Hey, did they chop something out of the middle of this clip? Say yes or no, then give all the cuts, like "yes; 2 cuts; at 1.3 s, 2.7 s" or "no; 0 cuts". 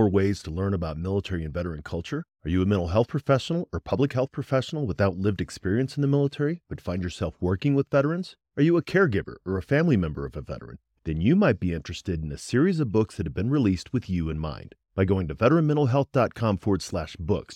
no; 0 cuts